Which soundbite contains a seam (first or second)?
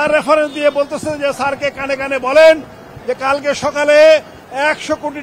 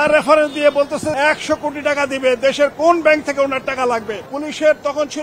second